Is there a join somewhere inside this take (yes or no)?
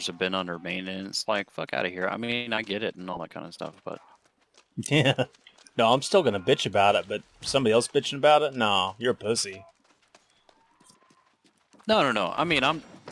no